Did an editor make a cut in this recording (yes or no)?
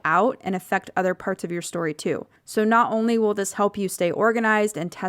yes